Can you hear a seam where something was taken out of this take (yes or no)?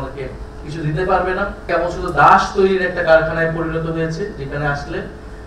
yes